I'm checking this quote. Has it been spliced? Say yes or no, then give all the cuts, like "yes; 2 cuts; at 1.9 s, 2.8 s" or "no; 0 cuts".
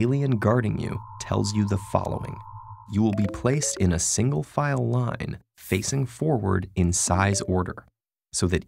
yes; 1 cut; at 6.0 s